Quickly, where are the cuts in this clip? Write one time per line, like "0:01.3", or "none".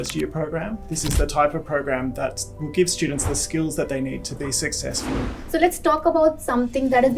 0:00.9
0:05.4